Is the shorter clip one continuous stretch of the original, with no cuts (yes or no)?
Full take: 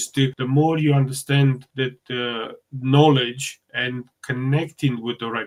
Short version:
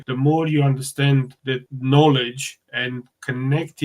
no